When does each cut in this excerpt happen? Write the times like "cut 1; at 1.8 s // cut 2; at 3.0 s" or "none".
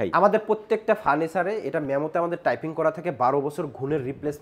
none